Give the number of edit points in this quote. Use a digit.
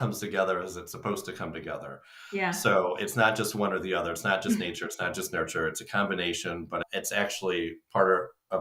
0